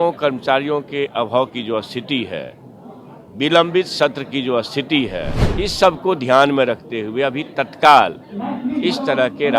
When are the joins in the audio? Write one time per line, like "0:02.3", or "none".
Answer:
0:05.4